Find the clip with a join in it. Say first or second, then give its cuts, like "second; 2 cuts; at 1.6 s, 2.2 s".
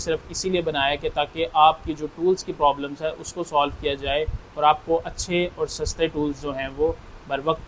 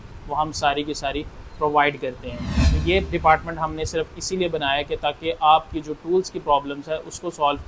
second; 1 cut; at 2.5 s